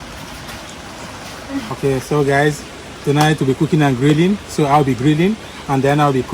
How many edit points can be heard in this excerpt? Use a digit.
1